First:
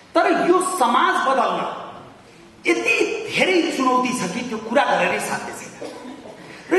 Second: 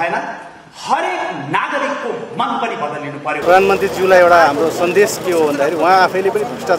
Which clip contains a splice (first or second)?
second